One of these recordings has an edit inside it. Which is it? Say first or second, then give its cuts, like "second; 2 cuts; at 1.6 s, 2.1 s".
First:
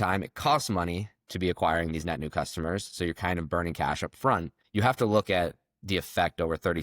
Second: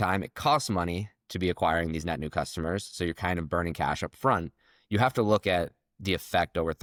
first; 1 cut; at 4.6 s